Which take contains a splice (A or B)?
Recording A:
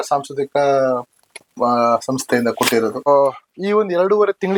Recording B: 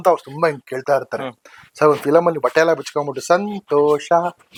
A